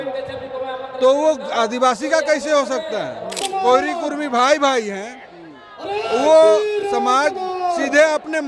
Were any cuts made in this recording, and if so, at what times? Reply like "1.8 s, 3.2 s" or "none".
3.4 s